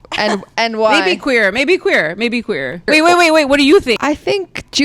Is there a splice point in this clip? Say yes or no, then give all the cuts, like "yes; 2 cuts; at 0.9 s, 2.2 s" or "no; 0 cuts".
yes; 2 cuts; at 2.9 s, 4.0 s